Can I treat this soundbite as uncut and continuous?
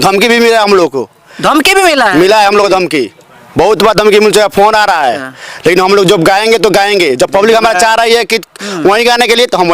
yes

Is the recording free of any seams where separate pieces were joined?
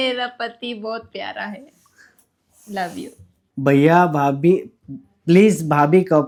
yes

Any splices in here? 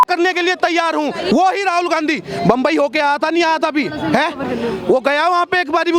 yes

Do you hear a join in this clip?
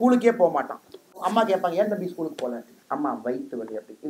yes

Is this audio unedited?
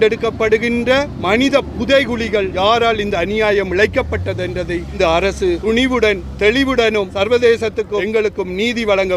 no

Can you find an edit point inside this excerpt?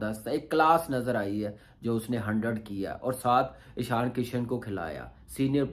no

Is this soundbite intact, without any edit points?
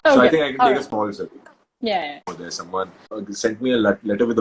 no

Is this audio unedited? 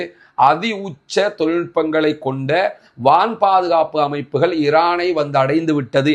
yes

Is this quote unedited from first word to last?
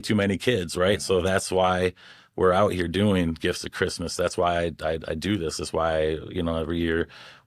yes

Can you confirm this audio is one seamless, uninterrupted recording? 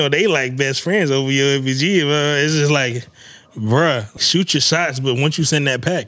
no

